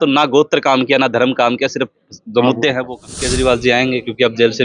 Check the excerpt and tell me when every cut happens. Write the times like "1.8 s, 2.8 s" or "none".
3.2 s